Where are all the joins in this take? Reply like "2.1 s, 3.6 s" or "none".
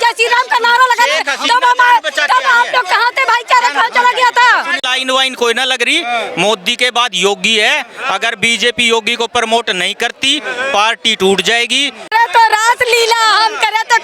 4.8 s, 12.1 s